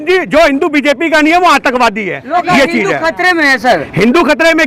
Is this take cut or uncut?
uncut